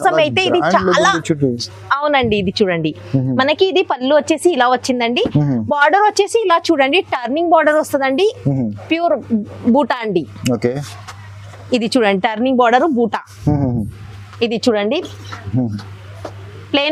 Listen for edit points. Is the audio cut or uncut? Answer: uncut